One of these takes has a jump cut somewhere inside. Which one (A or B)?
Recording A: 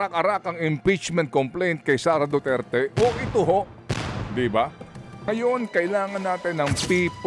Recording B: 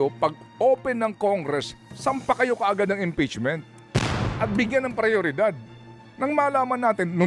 A